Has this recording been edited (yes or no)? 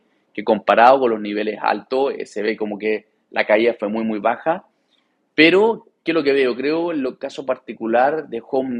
no